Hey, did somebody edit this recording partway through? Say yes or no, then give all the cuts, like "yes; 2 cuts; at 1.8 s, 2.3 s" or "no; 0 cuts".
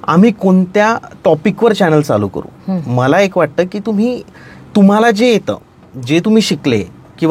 no; 0 cuts